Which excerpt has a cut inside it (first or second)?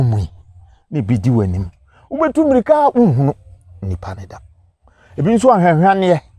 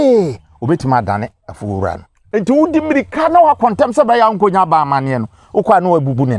second